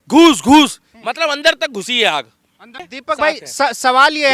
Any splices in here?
yes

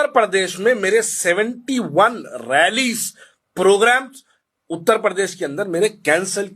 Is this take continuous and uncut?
yes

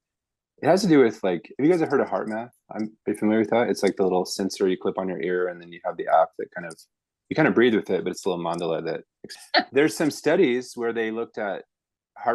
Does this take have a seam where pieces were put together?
yes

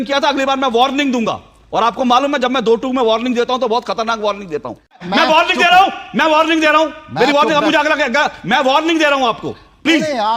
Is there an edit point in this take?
yes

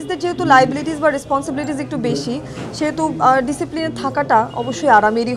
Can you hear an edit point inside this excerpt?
no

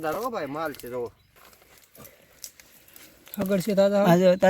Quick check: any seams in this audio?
yes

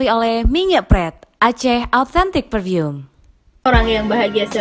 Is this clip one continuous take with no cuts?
no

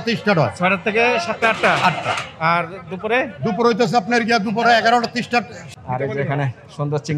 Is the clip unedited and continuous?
no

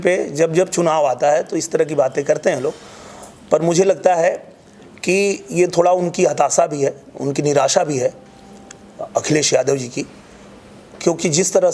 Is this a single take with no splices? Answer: yes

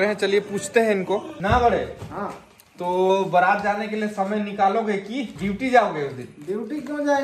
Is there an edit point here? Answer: yes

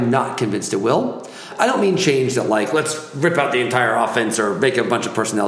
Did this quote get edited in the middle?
yes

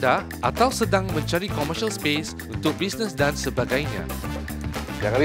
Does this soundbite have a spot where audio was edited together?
no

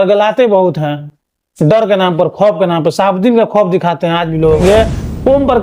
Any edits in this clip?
yes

